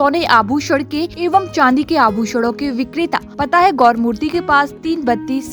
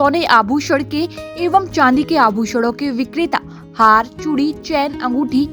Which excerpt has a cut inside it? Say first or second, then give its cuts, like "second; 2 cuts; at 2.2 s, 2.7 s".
first; 2 cuts; at 1.1 s, 3.3 s